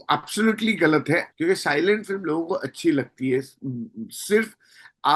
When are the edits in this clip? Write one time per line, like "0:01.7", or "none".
0:01.3